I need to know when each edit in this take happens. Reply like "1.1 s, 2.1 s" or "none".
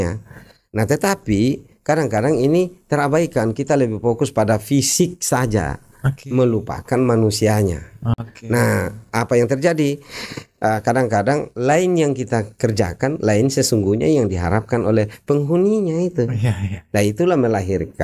none